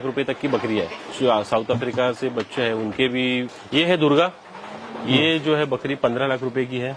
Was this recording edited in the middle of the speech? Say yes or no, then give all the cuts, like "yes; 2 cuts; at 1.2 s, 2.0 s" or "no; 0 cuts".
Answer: yes; 2 cuts; at 1.0 s, 3.6 s